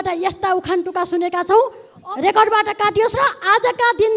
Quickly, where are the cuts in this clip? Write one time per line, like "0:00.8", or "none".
0:01.9